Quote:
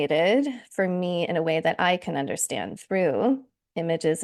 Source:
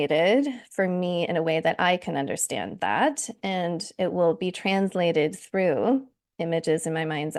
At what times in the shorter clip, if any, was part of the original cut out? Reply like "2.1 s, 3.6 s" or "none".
2.8 s